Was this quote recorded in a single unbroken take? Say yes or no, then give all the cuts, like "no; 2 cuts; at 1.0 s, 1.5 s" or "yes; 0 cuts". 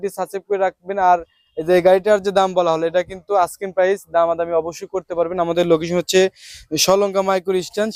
yes; 0 cuts